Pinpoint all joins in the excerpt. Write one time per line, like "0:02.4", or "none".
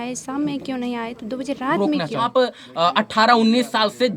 0:02.3